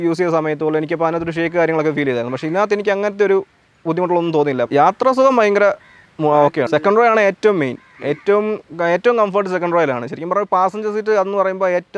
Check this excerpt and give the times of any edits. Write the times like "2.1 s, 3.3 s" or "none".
4.7 s